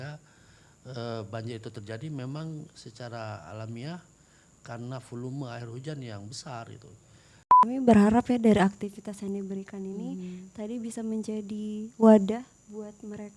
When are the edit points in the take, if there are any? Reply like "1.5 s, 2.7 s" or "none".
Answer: 7.6 s

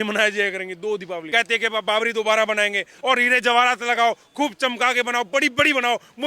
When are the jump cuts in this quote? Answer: 1.2 s, 2.9 s

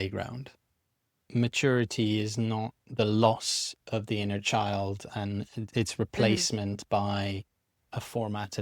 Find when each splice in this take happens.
1.2 s

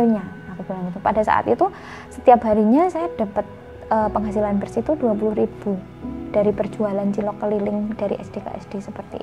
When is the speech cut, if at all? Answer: 8.0 s

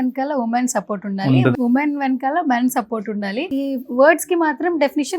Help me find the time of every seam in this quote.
1.5 s, 3.5 s

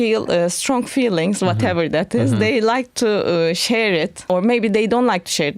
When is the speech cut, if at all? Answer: 4.2 s

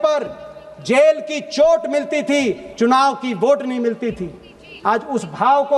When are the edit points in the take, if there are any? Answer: none

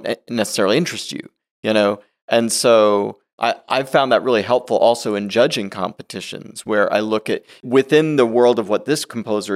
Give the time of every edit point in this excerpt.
3.3 s, 7.6 s

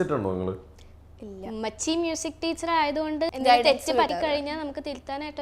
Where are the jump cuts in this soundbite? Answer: 3.3 s, 4.1 s

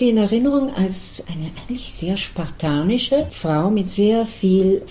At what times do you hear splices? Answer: 1.2 s, 3.3 s

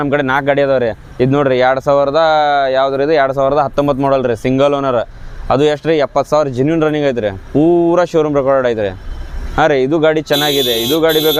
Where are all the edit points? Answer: none

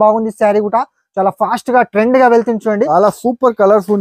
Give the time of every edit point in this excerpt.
2.9 s

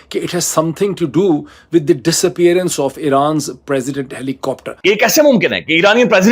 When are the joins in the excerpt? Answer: 4.7 s

